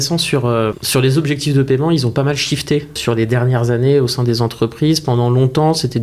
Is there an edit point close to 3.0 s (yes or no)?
yes